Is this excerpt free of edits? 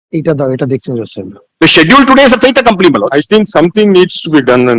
yes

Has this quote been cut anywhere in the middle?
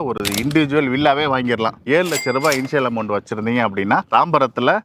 yes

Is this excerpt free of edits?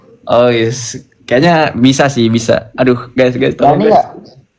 yes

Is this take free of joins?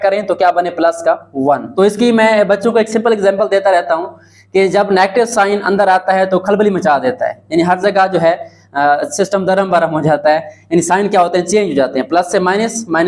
no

